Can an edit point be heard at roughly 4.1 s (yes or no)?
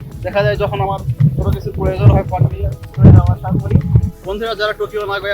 yes